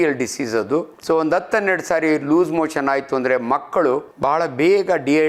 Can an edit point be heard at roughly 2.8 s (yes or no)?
no